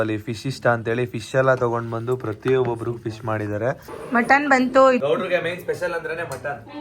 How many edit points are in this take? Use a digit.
2